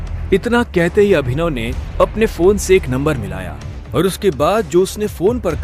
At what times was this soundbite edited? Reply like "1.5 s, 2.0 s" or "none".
none